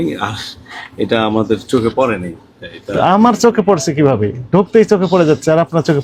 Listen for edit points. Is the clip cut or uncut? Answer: uncut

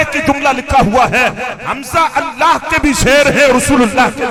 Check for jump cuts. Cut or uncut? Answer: uncut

